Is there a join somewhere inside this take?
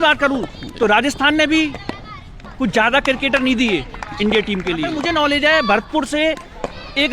yes; 1 cut; at 5.0 s

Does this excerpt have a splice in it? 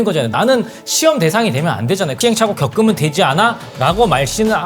yes; 1 cut; at 2.1 s

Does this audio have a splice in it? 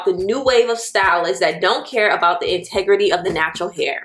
no; 0 cuts

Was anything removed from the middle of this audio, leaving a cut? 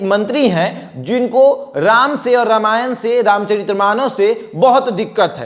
no; 0 cuts

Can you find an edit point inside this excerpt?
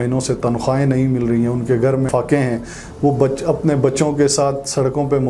no; 0 cuts

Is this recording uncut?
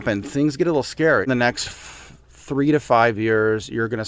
no; 1 cut; at 1.2 s

